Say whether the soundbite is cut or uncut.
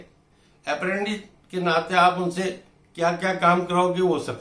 uncut